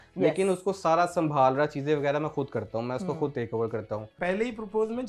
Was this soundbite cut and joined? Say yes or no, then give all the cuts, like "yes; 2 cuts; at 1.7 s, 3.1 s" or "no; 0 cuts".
yes; 1 cut; at 4.1 s